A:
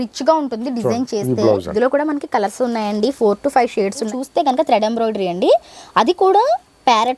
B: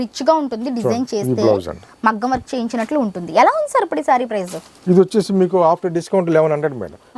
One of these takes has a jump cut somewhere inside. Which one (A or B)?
A